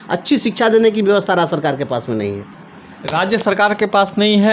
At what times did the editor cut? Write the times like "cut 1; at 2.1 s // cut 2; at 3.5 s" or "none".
none